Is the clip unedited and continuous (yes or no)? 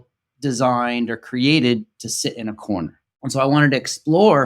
no